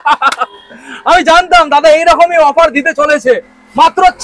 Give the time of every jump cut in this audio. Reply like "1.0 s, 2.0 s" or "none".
none